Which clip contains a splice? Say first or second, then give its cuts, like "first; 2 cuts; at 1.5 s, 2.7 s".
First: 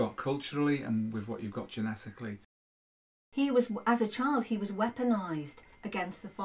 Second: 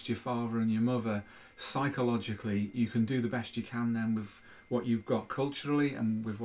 first; 1 cut; at 3.1 s